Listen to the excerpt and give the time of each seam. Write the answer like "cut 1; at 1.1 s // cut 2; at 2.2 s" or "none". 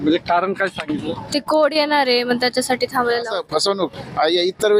cut 1; at 3.2 s